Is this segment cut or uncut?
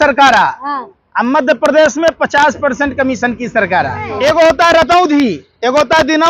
cut